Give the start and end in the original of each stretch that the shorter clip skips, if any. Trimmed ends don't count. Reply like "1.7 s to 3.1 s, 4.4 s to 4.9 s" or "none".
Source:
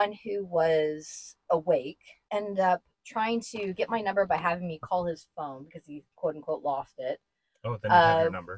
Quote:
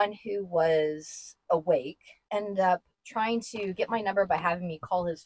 none